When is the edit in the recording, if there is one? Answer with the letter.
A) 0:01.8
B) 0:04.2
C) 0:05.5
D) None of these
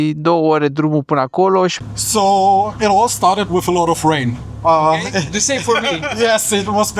A